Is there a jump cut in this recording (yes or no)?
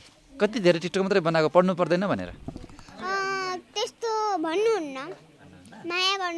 no